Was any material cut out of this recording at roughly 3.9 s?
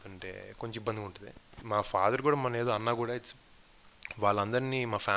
no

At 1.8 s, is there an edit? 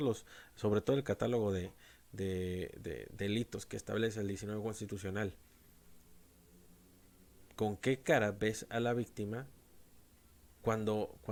no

